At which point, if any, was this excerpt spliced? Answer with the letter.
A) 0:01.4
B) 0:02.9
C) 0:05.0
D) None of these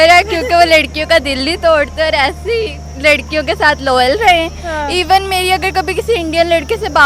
D